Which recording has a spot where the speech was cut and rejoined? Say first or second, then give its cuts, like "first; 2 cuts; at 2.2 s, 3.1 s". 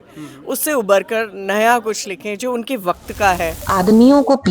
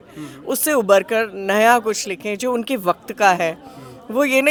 first; 1 cut; at 3.6 s